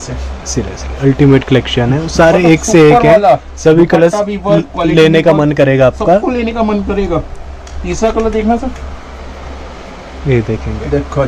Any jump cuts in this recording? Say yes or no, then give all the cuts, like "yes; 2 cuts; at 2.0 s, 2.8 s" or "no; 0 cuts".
no; 0 cuts